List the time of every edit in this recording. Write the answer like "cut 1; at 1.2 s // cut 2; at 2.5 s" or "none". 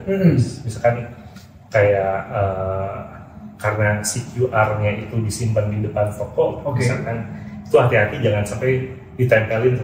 none